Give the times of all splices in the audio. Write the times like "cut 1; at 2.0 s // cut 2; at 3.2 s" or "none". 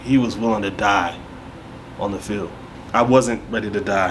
cut 1; at 2.7 s

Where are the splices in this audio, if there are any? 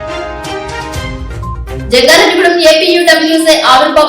cut 1; at 1.1 s

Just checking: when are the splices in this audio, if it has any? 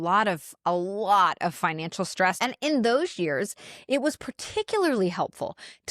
cut 1; at 2.4 s

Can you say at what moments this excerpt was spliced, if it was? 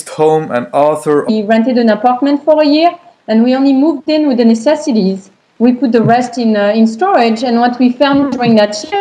none

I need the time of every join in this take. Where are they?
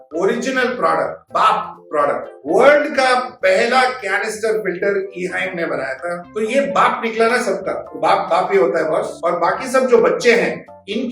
cut 1; at 1.2 s // cut 2; at 2.3 s // cut 3; at 6.3 s

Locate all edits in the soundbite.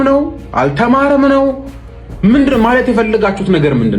none

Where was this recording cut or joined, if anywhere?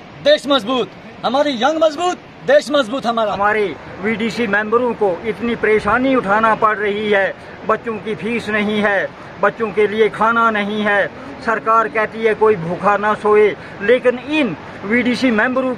cut 1; at 3.4 s

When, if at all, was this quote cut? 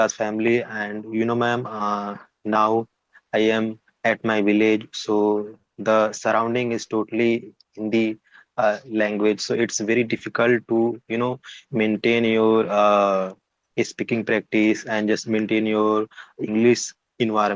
none

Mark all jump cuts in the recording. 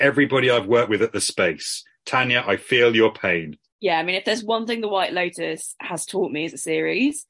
cut 1; at 3.6 s

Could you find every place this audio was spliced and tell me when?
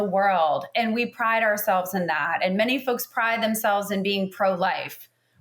none

